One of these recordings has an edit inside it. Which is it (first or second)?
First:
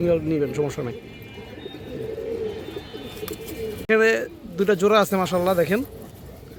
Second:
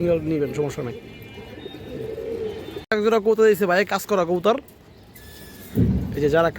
second